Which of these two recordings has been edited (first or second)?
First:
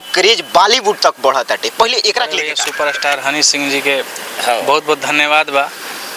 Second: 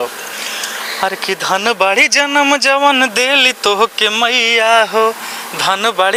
first